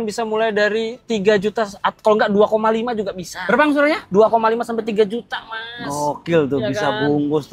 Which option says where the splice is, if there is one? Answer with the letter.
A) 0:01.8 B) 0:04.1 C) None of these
C